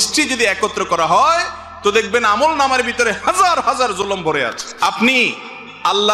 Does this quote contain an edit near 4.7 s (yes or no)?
yes